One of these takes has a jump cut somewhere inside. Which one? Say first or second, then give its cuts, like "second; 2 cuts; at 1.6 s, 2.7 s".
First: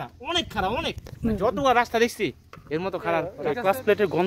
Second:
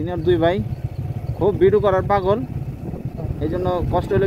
first; 1 cut; at 3.2 s